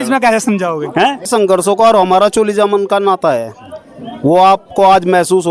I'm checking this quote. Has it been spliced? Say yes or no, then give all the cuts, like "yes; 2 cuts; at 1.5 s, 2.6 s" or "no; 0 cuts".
yes; 1 cut; at 1.2 s